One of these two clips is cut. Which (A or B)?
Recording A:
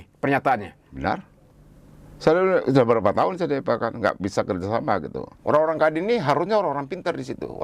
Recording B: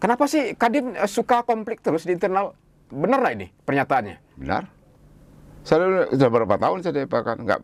A